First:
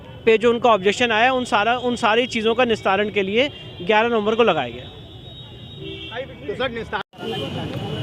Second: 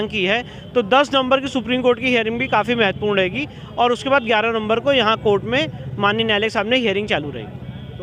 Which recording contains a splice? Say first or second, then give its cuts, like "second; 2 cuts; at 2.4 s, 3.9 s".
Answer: first; 1 cut; at 7.1 s